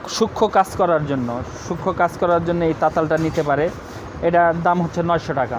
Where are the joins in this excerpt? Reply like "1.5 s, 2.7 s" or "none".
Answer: none